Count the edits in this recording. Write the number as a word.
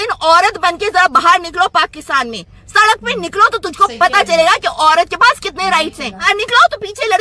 one